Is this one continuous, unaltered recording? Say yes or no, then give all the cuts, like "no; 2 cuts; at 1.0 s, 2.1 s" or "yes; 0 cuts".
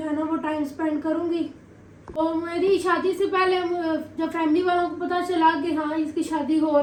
yes; 0 cuts